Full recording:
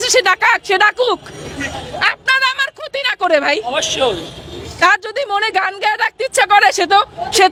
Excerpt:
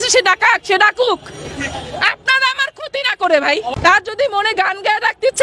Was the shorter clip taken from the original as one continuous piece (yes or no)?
no